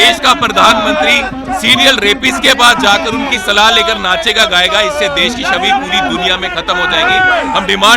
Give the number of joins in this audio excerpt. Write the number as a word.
zero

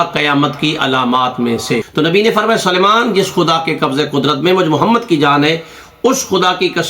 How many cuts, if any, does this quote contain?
one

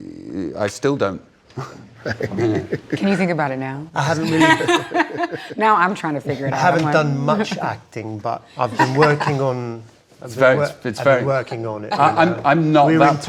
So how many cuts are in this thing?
one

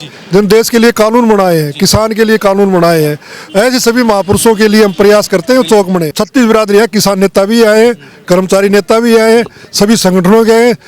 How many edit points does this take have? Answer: one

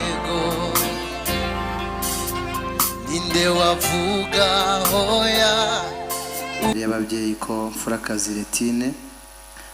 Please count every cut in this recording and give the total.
one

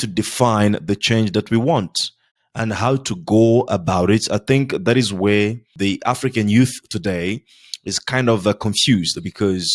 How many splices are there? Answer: one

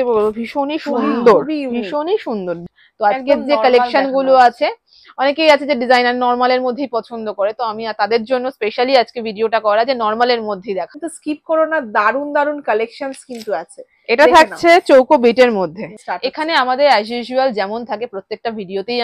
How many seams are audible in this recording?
three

